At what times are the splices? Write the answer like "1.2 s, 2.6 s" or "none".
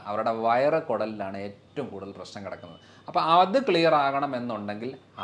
none